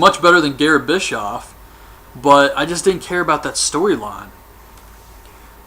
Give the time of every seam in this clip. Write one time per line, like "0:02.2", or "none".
0:04.4